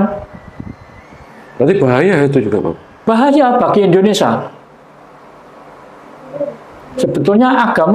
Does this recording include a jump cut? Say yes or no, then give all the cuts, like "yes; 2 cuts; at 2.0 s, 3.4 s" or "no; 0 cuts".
no; 0 cuts